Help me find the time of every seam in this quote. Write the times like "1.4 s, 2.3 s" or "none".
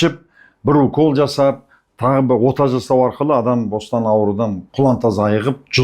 4.6 s